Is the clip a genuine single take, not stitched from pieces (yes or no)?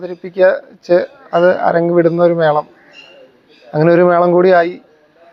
yes